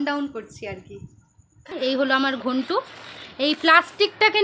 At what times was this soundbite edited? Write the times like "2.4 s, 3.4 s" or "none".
1.7 s